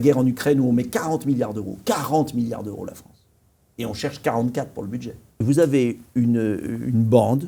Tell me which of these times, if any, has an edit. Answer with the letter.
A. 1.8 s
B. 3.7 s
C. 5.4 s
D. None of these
C